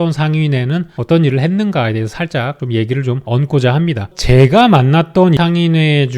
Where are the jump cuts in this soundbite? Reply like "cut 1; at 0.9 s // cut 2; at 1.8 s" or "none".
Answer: cut 1; at 4.1 s // cut 2; at 5.4 s